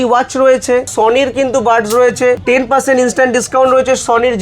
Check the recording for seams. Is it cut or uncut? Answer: cut